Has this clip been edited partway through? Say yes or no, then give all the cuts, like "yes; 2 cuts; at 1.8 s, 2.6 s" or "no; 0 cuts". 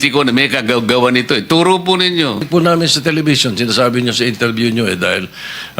yes; 1 cut; at 2.5 s